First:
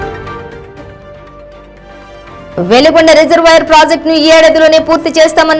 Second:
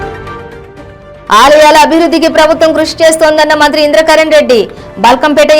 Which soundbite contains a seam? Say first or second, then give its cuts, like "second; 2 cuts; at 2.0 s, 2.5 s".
second; 1 cut; at 1.3 s